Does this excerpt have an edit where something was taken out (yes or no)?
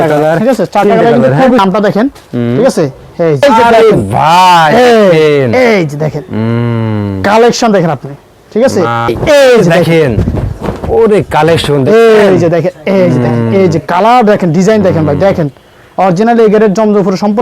yes